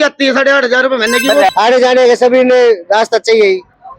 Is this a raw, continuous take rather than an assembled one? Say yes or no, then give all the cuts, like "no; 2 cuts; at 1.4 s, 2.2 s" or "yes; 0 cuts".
no; 1 cut; at 1.5 s